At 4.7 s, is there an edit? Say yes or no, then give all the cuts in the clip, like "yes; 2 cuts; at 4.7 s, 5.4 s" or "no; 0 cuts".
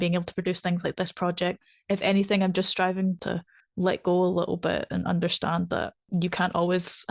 no; 2 cuts; at 1.6 s, 3.2 s